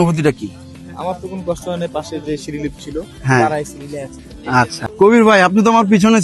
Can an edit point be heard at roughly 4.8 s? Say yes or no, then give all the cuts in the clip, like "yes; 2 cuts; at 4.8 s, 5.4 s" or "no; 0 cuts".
yes; 1 cut; at 4.8 s